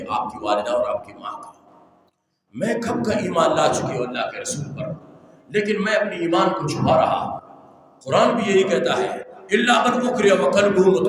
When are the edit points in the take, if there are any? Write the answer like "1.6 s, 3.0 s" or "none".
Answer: none